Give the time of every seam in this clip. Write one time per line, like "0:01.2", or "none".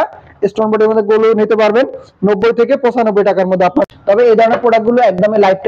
0:03.8